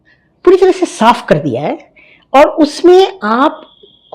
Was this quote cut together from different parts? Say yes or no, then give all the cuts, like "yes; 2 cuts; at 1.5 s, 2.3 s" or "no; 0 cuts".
no; 0 cuts